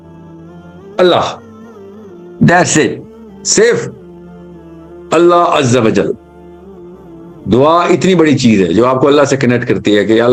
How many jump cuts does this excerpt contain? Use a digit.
0